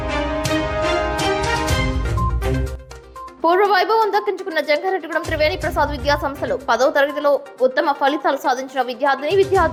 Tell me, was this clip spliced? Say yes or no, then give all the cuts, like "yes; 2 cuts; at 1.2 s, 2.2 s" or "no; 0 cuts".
no; 0 cuts